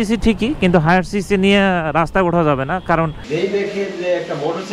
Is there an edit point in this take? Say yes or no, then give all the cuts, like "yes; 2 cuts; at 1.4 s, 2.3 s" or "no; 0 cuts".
yes; 1 cut; at 3.2 s